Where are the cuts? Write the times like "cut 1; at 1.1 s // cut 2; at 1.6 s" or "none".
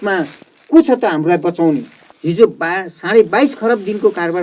cut 1; at 2.0 s